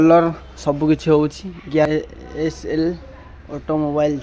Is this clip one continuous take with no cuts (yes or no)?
no